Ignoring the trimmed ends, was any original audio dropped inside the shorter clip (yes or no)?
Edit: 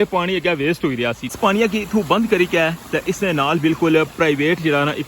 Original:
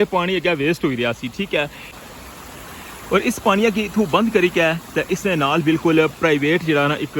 yes